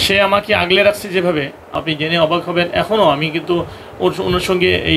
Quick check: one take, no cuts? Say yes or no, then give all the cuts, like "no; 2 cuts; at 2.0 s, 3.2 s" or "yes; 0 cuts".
no; 1 cut; at 1.8 s